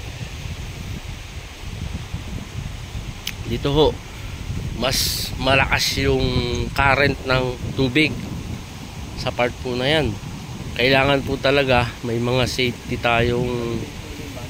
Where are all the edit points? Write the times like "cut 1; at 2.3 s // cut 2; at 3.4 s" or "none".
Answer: cut 1; at 10.5 s